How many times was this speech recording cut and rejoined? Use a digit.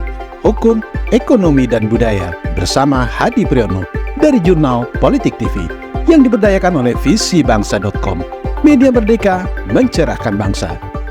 0